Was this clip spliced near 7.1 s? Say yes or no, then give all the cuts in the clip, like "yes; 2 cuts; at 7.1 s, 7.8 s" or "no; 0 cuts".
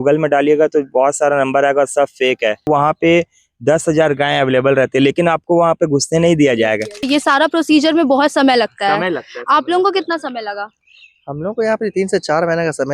yes; 2 cuts; at 2.7 s, 7.1 s